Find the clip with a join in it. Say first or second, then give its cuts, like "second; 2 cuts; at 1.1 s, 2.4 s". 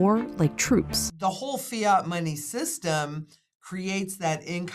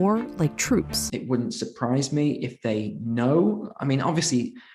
first; 1 cut; at 1.0 s